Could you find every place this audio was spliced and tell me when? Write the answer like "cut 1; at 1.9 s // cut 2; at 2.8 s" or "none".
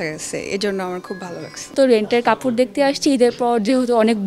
cut 1; at 1.7 s